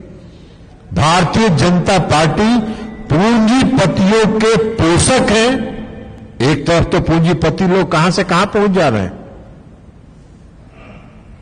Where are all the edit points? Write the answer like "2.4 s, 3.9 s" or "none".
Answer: none

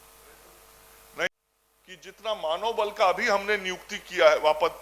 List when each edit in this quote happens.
1.3 s

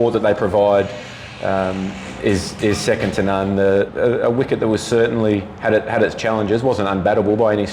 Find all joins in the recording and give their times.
3.9 s

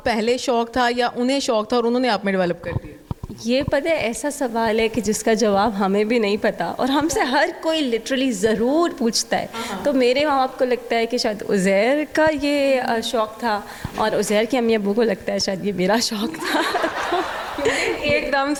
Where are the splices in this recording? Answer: none

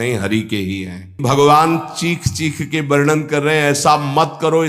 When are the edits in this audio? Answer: 1.2 s

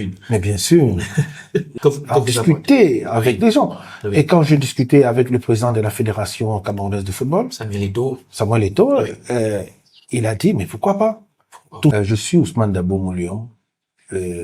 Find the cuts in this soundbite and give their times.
1.7 s, 11.9 s

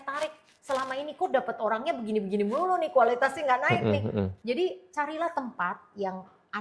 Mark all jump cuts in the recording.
4.4 s

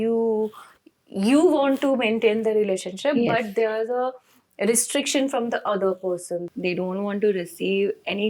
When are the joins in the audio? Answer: 6.5 s

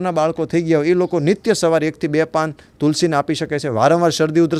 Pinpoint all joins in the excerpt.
none

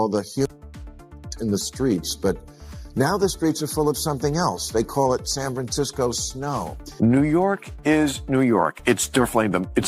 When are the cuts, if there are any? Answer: 6.9 s

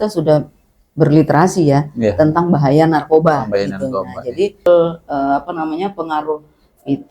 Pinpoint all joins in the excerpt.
4.7 s

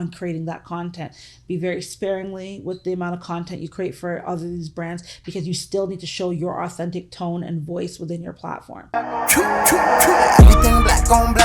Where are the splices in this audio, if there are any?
8.9 s

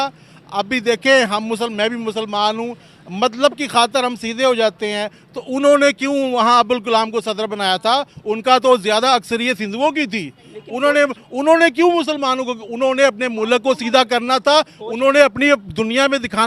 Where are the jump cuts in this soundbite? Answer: none

